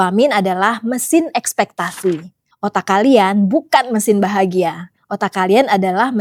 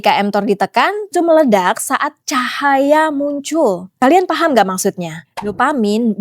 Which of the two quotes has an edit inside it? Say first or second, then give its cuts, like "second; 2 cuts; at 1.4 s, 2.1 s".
second; 1 cut; at 1.1 s